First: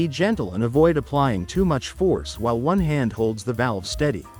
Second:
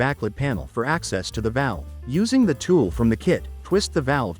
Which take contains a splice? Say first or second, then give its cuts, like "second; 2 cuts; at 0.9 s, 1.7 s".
second; 2 cuts; at 1.9 s, 3.5 s